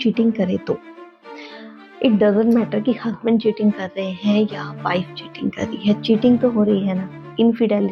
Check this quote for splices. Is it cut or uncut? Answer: uncut